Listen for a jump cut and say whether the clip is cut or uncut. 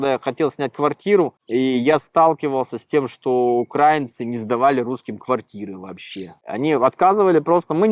cut